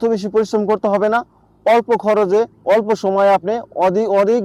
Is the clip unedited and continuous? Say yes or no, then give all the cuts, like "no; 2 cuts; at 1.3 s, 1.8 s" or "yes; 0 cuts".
yes; 0 cuts